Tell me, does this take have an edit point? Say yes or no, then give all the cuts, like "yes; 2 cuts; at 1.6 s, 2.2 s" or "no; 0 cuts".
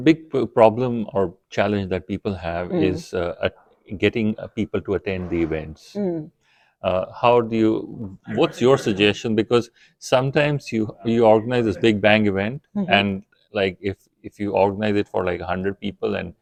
no; 0 cuts